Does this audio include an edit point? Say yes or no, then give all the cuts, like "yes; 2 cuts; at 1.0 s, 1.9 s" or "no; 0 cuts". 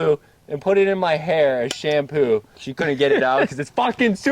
yes; 1 cut; at 2.6 s